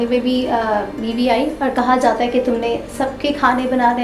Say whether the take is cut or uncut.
uncut